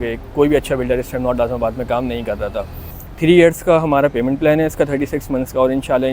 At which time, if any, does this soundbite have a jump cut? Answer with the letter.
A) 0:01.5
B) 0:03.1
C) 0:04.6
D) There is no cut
B